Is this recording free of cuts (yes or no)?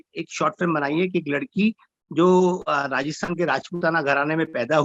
yes